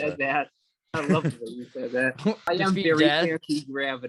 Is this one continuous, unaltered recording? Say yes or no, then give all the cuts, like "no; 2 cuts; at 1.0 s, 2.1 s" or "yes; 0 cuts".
no; 1 cut; at 2.5 s